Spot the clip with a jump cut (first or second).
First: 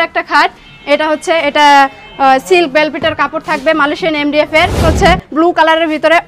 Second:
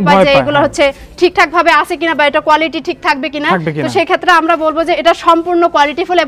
first